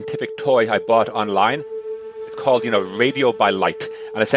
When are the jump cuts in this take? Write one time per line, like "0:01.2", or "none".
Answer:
0:02.0